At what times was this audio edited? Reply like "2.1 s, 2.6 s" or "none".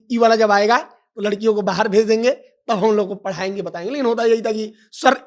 none